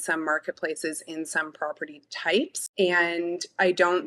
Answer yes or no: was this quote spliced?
yes